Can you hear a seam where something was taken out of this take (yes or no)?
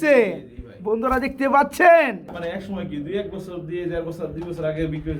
yes